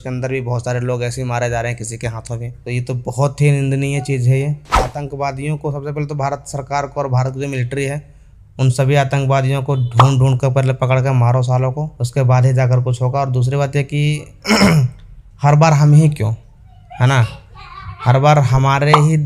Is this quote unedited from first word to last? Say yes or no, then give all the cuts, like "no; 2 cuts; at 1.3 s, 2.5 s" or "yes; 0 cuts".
no; 1 cut; at 4.8 s